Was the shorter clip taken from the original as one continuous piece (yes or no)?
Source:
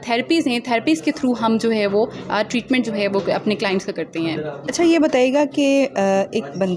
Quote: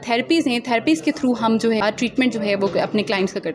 no